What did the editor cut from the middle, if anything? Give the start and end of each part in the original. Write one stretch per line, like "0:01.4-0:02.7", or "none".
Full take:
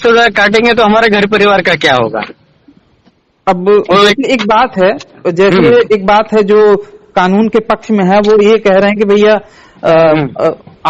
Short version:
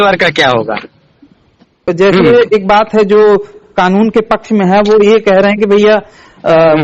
0:03.2-0:05.1